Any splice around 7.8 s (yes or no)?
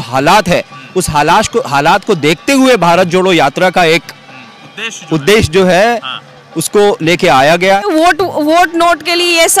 yes